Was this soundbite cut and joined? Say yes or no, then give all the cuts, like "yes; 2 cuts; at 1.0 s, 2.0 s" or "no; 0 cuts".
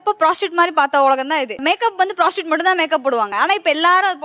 yes; 2 cuts; at 1.6 s, 3.3 s